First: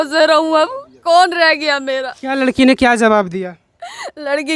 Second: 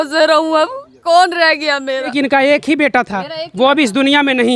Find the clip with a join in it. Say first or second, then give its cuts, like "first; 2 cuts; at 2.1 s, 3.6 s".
second; 1 cut; at 2.1 s